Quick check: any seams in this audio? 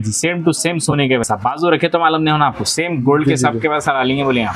no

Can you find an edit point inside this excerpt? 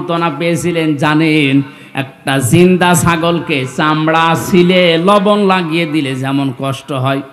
no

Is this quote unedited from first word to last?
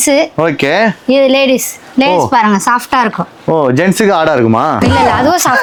yes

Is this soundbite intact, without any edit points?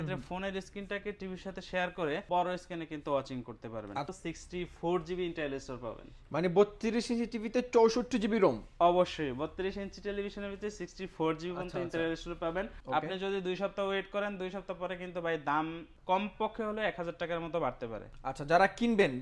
no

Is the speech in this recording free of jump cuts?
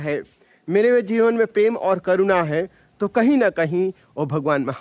yes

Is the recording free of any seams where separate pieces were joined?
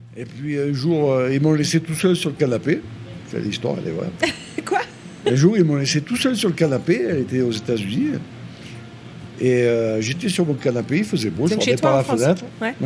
yes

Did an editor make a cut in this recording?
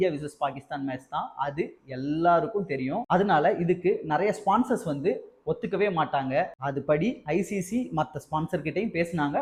no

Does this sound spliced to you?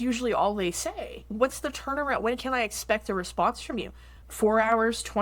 yes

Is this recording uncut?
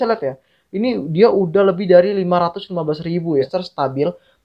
no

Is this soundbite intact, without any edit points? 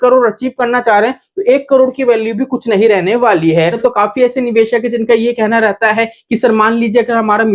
no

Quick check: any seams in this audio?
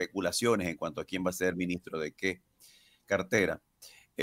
no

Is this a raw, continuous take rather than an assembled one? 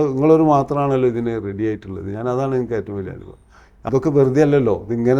no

